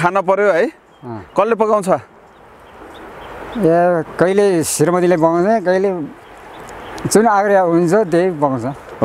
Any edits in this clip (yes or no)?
no